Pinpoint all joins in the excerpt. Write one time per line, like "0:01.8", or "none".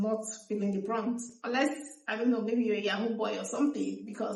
none